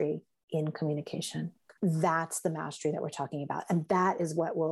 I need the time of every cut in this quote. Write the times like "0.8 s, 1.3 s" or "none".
1.7 s